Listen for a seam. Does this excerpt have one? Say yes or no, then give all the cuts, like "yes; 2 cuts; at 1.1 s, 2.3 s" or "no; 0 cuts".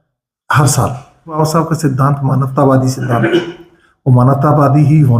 yes; 1 cut; at 1.4 s